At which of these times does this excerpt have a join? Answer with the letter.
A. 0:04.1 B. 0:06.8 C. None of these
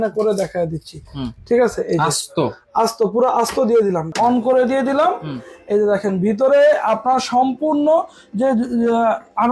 A